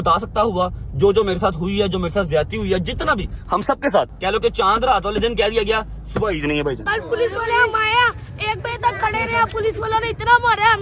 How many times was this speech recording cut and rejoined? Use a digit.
2